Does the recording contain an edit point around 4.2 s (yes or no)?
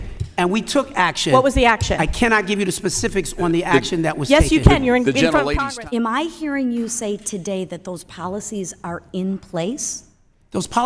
no